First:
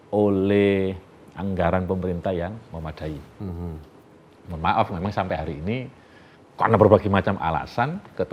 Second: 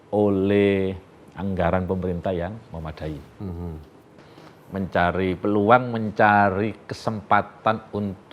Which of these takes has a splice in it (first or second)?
second